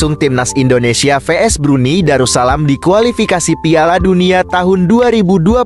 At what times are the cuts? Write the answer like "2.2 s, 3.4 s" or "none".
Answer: none